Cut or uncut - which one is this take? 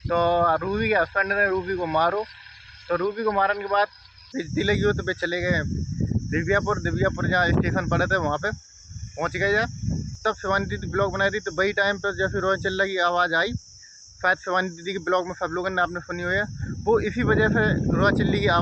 cut